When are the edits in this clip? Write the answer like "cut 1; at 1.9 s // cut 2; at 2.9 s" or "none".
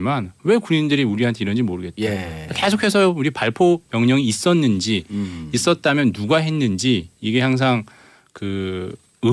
cut 1; at 7.2 s